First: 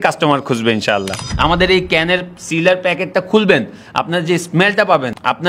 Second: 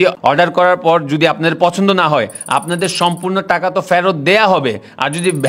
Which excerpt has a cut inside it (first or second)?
first